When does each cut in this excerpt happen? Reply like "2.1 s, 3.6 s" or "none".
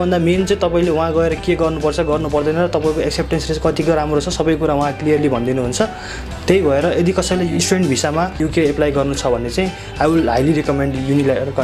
8.4 s